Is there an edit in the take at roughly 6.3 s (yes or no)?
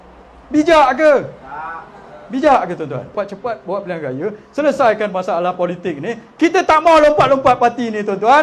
no